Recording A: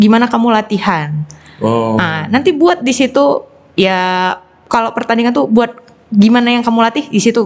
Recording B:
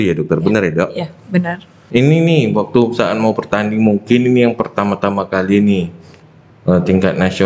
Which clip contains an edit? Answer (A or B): B